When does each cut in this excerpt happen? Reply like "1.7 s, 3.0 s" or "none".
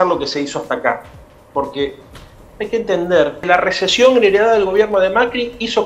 3.4 s